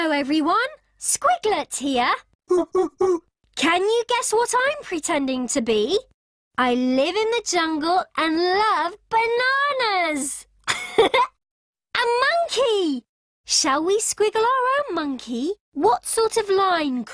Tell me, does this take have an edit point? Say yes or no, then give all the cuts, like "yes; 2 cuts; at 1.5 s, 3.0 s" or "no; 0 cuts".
yes; 1 cut; at 10.0 s